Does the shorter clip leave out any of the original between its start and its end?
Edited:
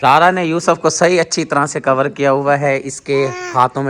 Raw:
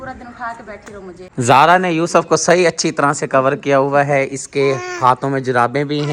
no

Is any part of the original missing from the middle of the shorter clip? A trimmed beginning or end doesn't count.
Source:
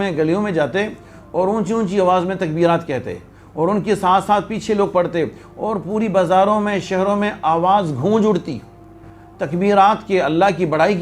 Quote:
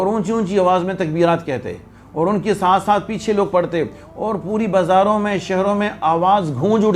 no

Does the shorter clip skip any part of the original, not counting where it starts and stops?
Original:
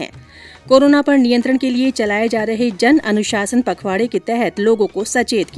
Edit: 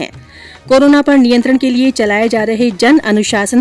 no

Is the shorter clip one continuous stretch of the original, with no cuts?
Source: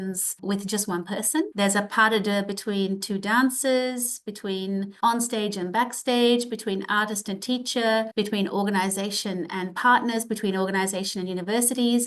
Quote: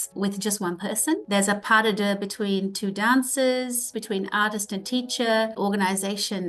no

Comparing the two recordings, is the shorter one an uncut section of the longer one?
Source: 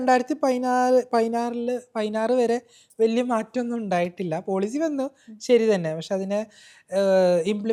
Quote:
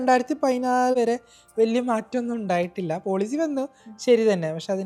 no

